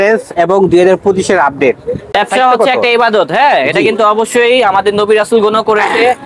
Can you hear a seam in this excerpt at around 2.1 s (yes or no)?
yes